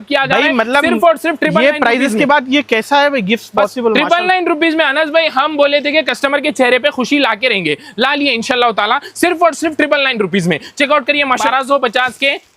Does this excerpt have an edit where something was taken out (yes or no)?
yes